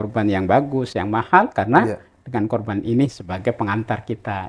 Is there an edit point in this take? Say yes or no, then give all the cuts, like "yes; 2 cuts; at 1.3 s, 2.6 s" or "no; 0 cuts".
no; 0 cuts